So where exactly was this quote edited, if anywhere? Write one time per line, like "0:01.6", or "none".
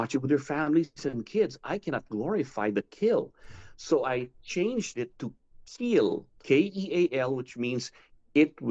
0:06.4